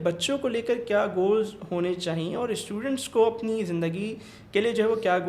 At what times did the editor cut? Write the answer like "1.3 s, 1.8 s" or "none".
none